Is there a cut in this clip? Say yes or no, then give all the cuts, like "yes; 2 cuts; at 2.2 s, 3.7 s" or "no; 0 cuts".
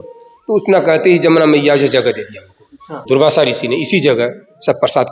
yes; 1 cut; at 3.0 s